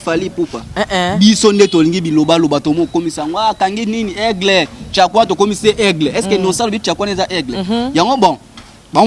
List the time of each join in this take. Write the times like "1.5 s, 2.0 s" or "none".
none